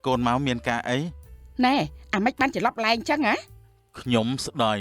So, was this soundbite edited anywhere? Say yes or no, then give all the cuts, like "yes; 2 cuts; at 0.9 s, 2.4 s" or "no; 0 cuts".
no; 0 cuts